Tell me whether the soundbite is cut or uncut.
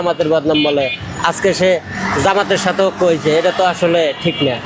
uncut